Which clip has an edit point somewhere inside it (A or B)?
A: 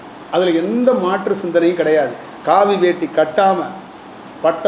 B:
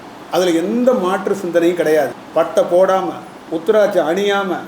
B